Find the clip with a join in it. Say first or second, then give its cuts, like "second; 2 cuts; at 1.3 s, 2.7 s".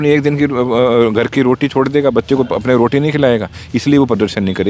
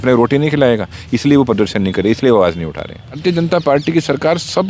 second; 1 cut; at 3.2 s